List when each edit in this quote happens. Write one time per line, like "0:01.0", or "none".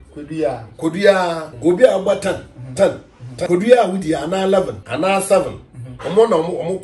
0:01.5
0:03.5
0:04.8

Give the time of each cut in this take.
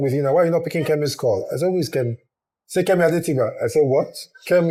none

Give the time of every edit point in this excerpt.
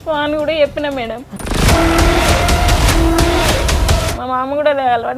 0:01.4
0:03.9

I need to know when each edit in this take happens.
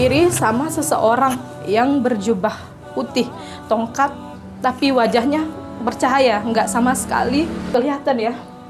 0:07.7

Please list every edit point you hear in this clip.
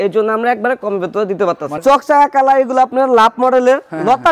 0:01.8

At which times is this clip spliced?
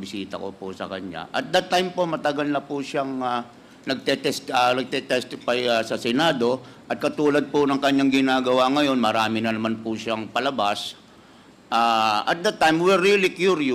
none

